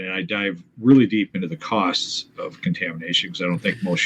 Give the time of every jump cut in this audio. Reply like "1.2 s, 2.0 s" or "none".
none